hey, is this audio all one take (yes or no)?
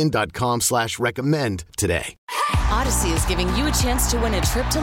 no